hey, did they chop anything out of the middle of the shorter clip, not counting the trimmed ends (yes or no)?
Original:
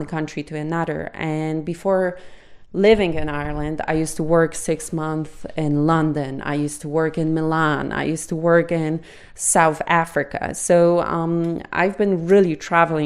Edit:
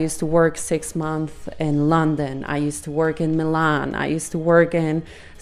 no